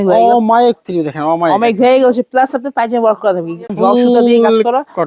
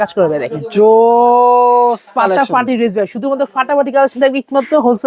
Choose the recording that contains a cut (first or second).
first